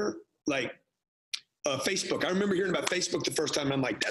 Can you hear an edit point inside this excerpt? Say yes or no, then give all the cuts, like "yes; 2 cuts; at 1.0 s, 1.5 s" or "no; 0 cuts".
no; 0 cuts